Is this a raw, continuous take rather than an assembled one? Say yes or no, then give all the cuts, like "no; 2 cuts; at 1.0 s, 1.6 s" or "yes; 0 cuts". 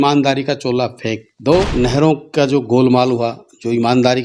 no; 1 cut; at 1.7 s